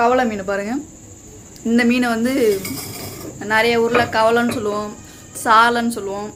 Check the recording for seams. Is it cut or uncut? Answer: uncut